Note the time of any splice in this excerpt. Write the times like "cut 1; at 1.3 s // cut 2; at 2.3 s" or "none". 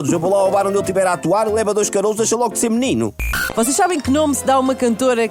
cut 1; at 3.4 s